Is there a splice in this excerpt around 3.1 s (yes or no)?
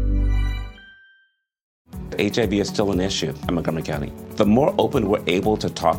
no